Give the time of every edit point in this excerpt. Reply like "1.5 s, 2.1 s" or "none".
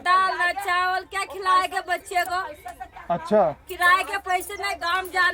none